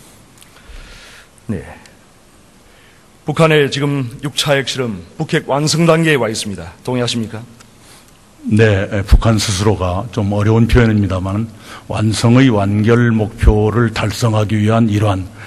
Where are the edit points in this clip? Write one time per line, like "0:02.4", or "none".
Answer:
0:12.3